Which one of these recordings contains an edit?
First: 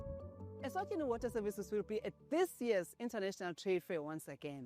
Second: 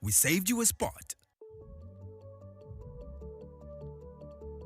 second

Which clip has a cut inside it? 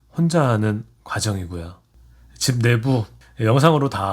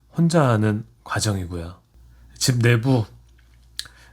first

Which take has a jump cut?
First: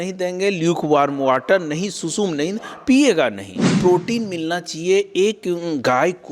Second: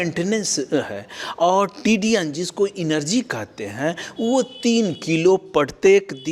first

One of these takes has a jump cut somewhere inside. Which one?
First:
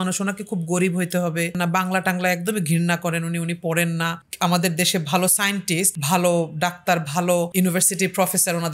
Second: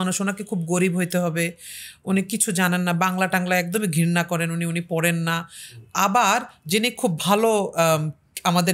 first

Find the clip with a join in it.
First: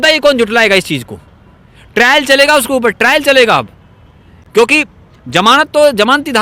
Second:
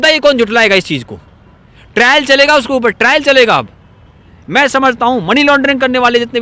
second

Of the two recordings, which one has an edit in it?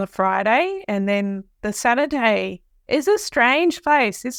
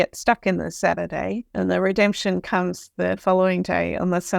second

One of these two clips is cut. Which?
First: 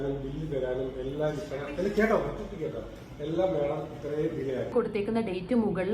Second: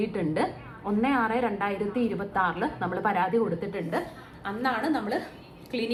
first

